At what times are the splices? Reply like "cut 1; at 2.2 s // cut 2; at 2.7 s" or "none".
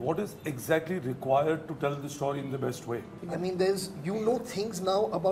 cut 1; at 3.2 s